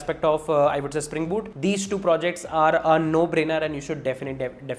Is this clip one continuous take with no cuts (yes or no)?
no